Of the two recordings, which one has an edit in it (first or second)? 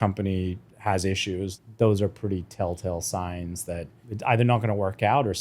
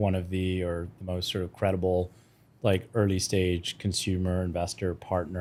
first